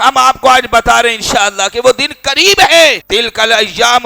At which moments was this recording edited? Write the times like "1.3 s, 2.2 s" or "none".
3.0 s